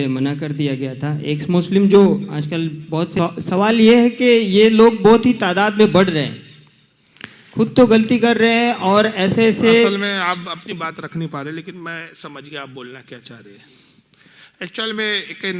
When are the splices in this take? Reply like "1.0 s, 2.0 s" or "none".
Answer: 3.1 s